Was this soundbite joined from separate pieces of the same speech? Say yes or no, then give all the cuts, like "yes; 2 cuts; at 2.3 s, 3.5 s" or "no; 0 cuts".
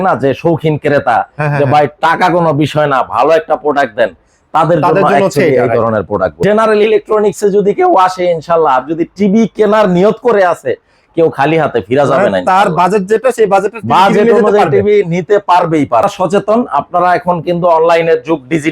yes; 2 cuts; at 6.4 s, 16.0 s